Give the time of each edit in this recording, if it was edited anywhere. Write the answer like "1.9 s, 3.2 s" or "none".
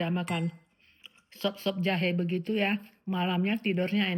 none

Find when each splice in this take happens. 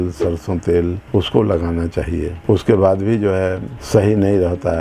none

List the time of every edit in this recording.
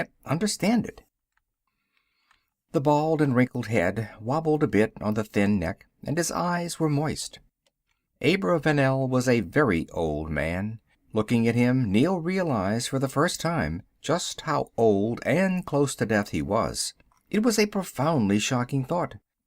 13.8 s

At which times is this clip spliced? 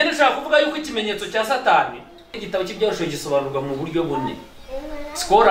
2.4 s

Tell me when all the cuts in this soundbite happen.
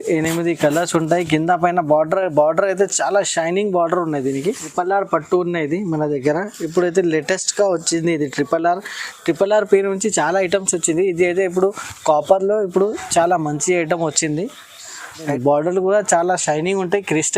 4.7 s, 15.2 s

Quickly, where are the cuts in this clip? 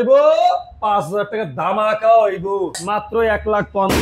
2.8 s

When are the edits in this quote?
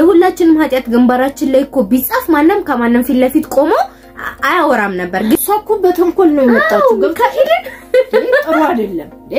5.3 s

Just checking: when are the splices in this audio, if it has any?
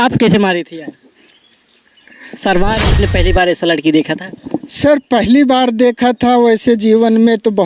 3.0 s

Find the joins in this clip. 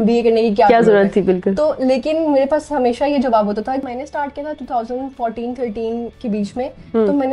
3.8 s

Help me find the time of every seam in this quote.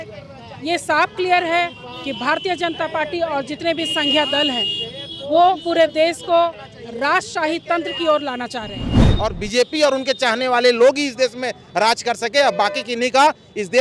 9.0 s

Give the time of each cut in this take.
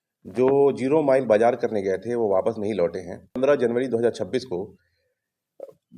3.4 s

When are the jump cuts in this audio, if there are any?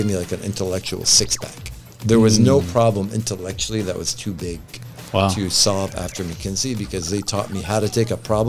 none

